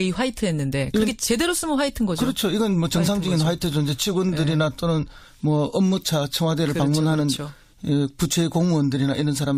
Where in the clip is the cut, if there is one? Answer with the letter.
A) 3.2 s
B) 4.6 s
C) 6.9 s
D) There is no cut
A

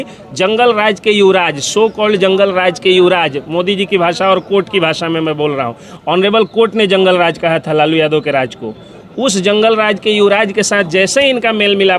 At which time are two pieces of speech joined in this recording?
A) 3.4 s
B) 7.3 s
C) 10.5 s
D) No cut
D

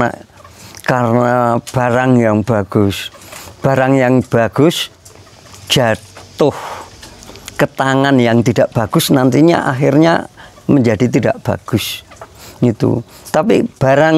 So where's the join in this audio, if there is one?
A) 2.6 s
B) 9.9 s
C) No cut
C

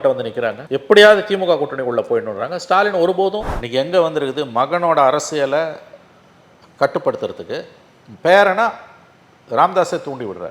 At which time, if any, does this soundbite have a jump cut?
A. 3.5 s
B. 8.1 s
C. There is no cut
A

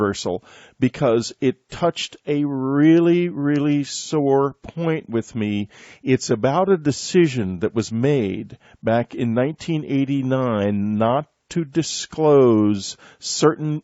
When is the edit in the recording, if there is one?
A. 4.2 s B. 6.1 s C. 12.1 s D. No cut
A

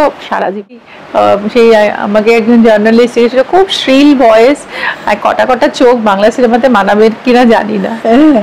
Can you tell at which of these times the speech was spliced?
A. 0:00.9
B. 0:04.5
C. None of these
A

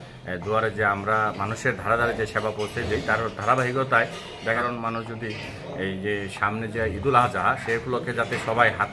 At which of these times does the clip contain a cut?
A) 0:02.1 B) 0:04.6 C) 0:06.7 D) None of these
B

